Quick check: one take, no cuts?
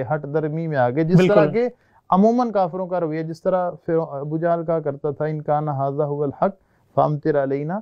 yes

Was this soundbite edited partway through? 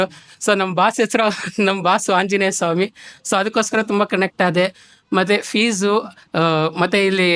no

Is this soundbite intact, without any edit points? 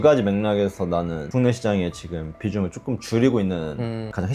yes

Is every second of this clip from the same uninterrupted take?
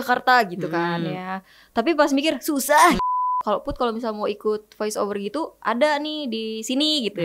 no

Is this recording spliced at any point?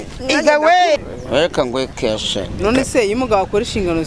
yes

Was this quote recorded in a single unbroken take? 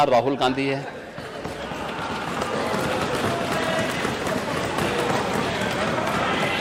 yes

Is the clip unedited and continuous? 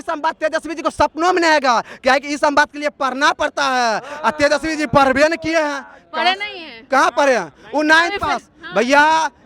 yes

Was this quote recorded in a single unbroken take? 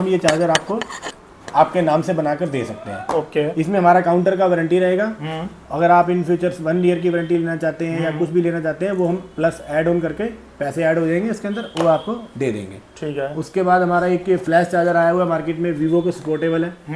yes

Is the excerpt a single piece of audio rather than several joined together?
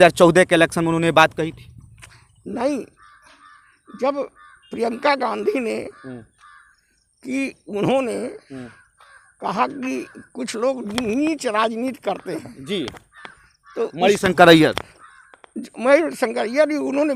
yes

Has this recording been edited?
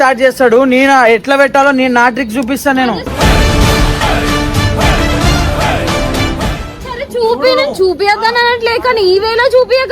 no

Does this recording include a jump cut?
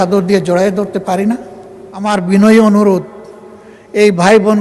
yes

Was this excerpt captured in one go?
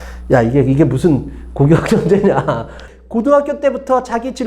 no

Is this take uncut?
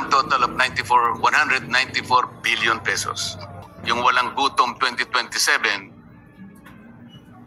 no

